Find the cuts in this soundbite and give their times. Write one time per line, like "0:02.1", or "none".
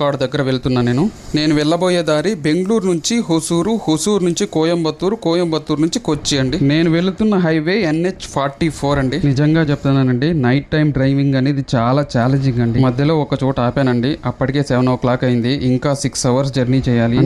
none